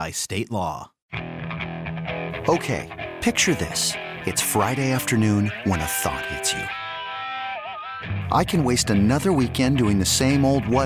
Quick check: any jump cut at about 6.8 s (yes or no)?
no